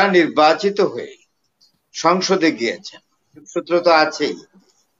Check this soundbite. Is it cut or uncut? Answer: cut